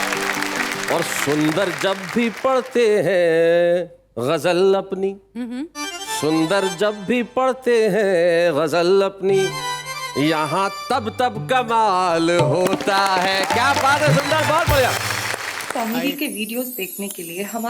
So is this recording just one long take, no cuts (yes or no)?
no